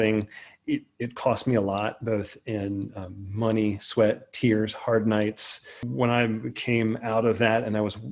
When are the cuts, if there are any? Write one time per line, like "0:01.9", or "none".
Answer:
0:05.8

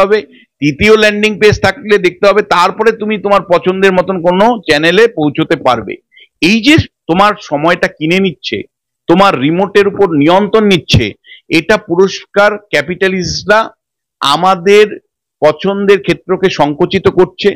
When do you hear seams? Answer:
none

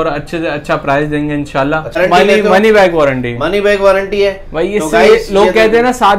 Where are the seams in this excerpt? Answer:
0:02.0

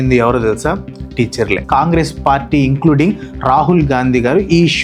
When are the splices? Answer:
0:01.6

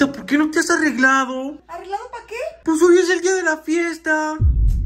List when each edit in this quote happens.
none

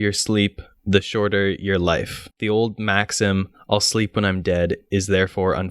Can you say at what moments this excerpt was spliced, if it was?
0:02.2

